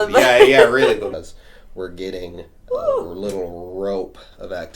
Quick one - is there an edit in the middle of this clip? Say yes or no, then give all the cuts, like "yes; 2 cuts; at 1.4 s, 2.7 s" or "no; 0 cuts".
yes; 1 cut; at 1.1 s